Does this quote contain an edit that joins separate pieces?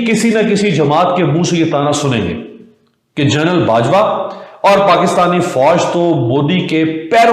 no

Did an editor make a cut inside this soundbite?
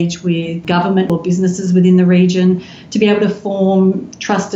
yes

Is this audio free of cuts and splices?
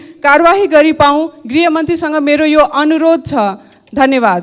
yes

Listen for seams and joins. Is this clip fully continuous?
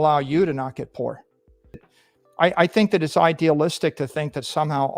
no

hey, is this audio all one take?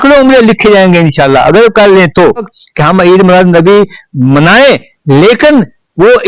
no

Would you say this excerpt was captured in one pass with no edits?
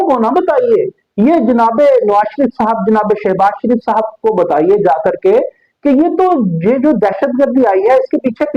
yes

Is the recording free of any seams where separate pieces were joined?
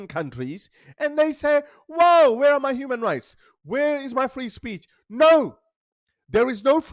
yes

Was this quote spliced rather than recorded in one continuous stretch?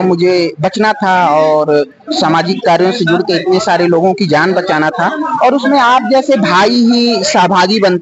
no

